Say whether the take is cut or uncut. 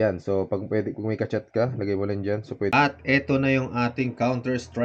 cut